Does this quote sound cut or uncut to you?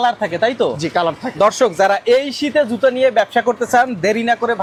uncut